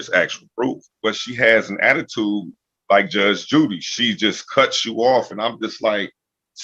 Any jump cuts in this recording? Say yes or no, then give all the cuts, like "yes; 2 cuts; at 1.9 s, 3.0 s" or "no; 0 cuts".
yes; 1 cut; at 1.0 s